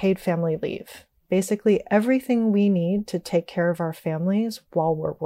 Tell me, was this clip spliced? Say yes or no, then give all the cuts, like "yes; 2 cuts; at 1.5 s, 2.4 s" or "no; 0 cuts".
no; 0 cuts